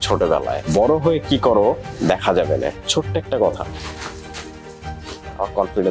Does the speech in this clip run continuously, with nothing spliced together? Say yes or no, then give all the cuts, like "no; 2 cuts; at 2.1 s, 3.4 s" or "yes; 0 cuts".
yes; 0 cuts